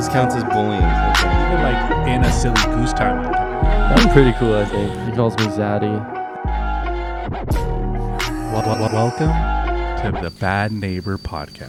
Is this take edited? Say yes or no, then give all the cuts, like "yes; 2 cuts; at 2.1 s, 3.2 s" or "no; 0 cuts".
no; 0 cuts